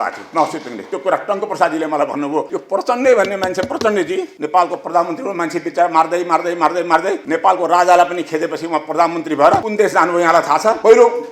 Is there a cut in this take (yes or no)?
yes